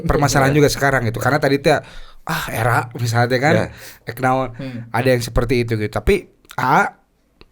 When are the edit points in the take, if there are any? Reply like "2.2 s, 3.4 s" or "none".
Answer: none